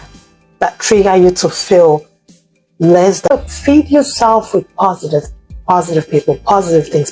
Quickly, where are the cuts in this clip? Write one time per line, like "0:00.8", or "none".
0:03.3